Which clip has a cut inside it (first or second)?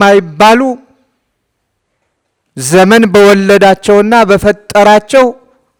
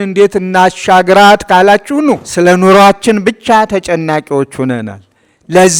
second